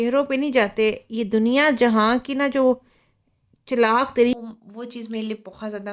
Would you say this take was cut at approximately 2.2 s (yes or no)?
no